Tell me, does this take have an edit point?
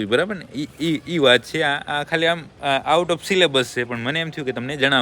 no; 0 cuts

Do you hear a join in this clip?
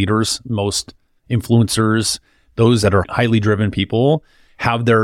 no; 0 cuts

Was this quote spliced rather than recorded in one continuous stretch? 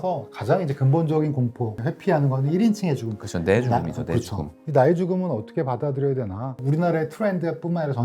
no; 0 cuts

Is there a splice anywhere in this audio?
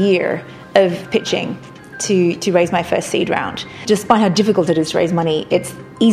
yes; 1 cut; at 3.8 s

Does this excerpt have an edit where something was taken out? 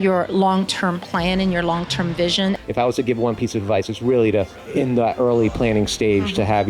yes; 2 cuts; at 2.6 s, 4.6 s

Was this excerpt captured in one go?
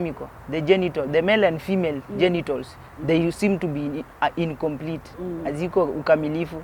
yes; 0 cuts

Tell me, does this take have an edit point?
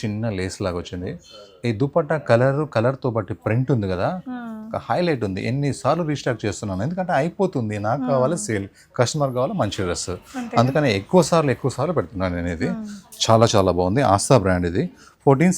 no; 0 cuts

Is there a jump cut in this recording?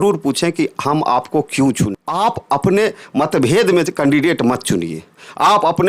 yes; 1 cut; at 2.0 s

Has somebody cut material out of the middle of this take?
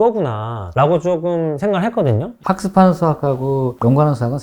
yes; 1 cut; at 2.3 s

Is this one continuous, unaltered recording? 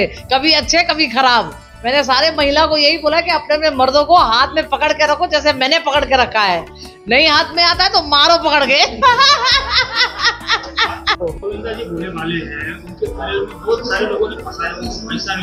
yes; 0 cuts

